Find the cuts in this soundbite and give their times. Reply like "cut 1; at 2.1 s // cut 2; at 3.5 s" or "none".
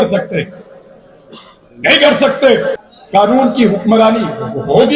cut 1; at 2.8 s